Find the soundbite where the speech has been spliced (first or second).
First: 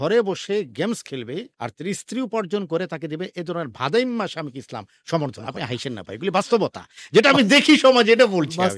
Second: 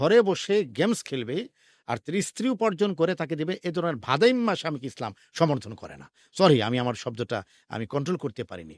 first